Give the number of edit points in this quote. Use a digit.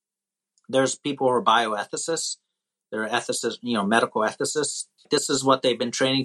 1